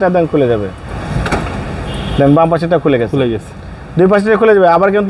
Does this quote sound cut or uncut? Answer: cut